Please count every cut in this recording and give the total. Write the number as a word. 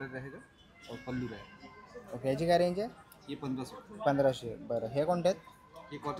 zero